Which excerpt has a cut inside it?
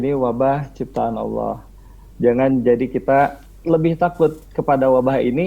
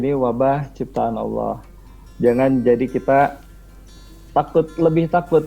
first; 1 cut; at 3.6 s

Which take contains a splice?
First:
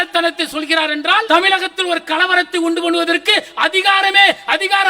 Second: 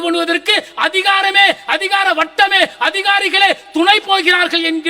first; 1 cut; at 1.3 s

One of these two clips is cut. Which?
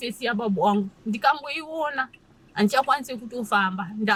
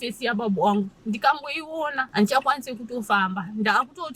second; 1 cut; at 2.0 s

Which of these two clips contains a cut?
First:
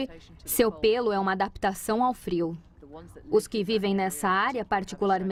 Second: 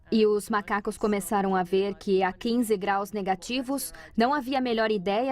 second; 1 cut; at 1.3 s

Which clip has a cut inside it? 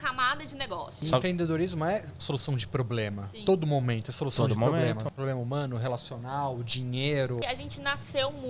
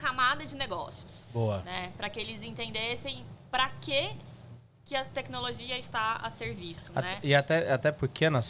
first; 3 cuts; at 0.9 s, 5.1 s, 7.4 s

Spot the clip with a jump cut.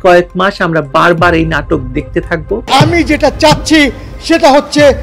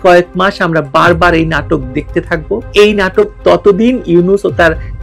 first; 1 cut; at 2.7 s

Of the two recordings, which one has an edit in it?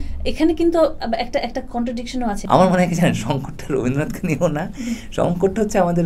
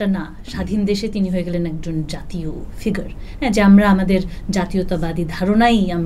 first; 1 cut; at 2.4 s

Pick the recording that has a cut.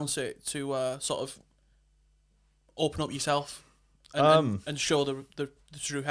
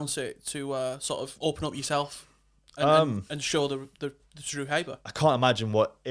second; 2 cuts; at 1.3 s, 5.1 s

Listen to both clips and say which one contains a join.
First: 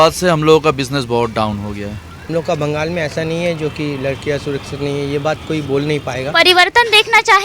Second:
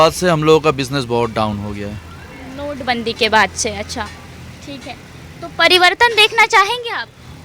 first; 2 cuts; at 2.1 s, 6.3 s

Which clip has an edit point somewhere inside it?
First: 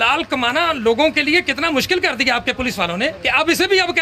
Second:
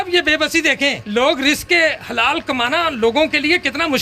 second; 1 cut; at 1.0 s

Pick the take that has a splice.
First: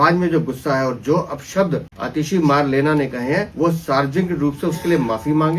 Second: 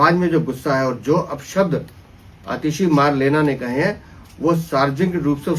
first; 2 cuts; at 2.0 s, 3.5 s

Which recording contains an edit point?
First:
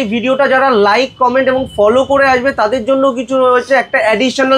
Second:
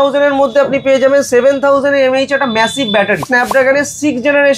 second; 1 cut; at 3.3 s

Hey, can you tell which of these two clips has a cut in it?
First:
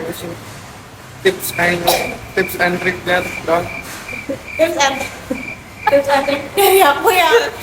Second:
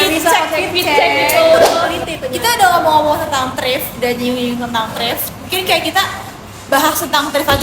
second; 1 cut; at 1.9 s

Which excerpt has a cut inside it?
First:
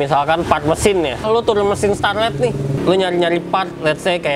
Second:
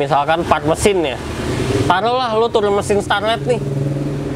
first; 2 cuts; at 1.2 s, 2.8 s

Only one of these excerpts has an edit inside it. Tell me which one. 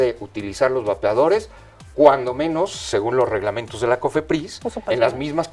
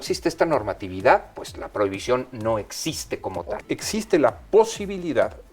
second; 1 cut; at 3.4 s

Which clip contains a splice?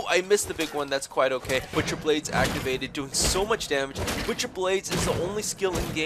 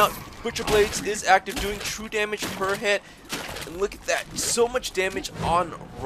first; 1 cut; at 1.7 s

